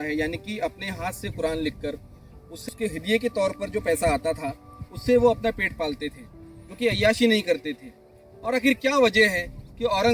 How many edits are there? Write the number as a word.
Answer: one